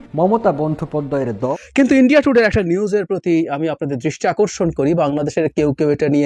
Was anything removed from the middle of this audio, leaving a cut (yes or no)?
yes